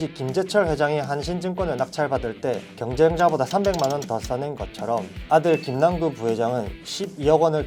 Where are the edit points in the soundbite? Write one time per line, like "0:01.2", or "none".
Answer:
none